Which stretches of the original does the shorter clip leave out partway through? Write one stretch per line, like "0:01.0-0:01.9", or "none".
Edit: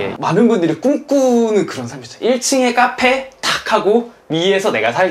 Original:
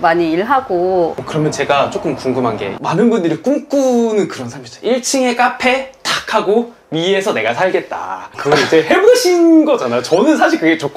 none